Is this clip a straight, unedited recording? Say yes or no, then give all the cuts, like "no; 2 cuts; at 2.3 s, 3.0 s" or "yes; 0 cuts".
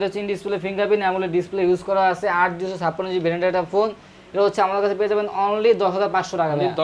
yes; 0 cuts